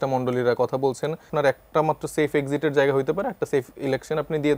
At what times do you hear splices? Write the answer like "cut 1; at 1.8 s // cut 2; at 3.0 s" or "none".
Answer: cut 1; at 1.3 s